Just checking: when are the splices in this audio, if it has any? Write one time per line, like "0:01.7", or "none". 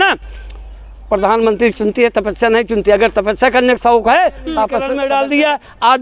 0:04.9